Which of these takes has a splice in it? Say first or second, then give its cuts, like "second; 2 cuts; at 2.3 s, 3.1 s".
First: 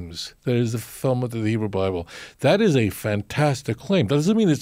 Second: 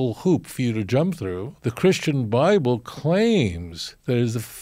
second; 1 cut; at 1.5 s